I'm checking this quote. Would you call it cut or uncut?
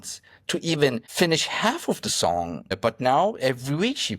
cut